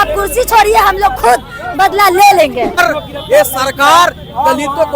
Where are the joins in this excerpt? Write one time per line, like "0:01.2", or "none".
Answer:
0:02.8

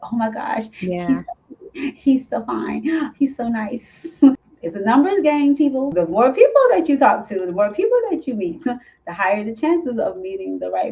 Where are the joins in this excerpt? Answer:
0:04.3
0:05.9

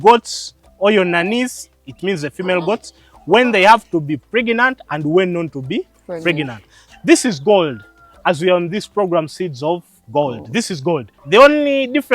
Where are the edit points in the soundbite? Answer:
0:06.8
0:11.1

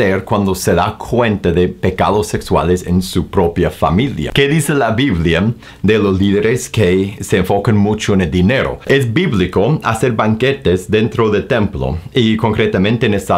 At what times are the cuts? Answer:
0:04.2
0:08.9

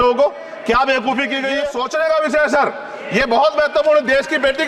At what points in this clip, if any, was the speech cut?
0:01.7

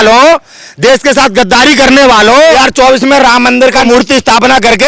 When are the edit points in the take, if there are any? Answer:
0:02.5
0:03.8

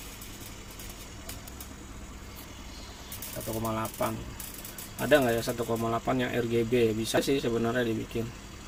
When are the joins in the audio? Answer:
none

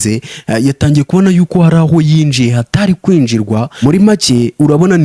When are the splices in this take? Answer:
0:03.7

